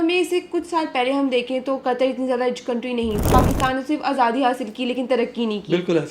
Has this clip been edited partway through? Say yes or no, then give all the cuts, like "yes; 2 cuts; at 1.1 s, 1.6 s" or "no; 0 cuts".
yes; 1 cut; at 3.3 s